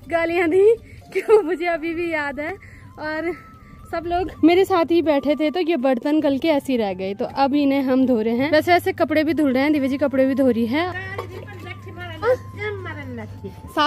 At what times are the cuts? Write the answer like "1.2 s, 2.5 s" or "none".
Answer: none